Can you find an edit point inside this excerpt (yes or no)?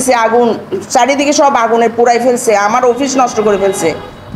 no